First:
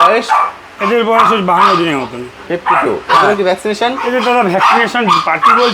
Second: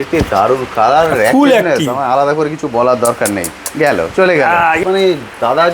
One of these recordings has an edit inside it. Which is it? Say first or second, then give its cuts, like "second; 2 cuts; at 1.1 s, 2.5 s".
second; 1 cut; at 4.8 s